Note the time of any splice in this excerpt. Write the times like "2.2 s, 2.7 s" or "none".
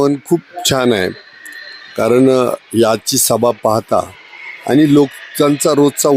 none